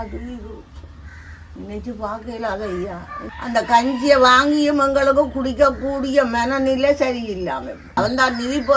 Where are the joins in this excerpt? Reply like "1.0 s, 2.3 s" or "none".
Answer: 3.2 s, 7.8 s